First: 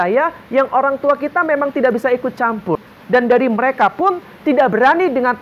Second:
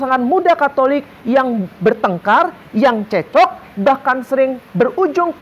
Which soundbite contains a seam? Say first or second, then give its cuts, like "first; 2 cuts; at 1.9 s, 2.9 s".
first; 1 cut; at 2.9 s